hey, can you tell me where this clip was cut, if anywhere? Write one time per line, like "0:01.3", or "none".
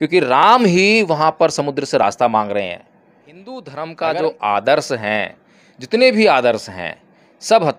0:02.9